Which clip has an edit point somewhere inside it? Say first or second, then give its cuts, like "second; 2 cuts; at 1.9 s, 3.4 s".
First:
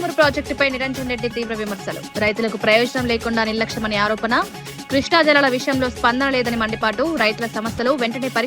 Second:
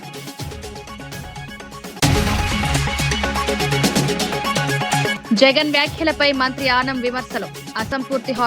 second; 3 cuts; at 2.0 s, 3.3 s, 4.7 s